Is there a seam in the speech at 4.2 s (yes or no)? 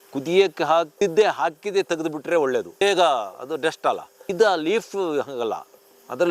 yes